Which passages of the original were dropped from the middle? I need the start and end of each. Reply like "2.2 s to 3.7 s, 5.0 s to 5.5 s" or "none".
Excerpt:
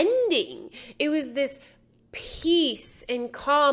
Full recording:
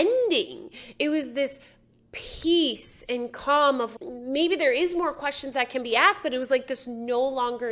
none

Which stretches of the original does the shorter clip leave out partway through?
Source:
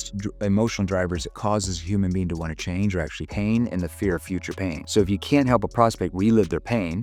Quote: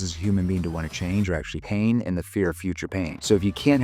none

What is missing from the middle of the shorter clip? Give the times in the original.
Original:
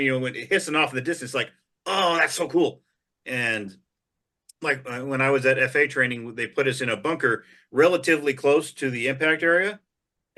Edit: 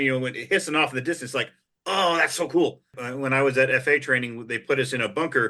3.0 s to 4.9 s

